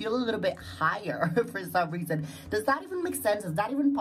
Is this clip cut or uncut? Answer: uncut